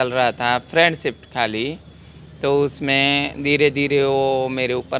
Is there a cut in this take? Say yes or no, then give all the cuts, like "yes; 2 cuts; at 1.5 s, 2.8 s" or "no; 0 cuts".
no; 0 cuts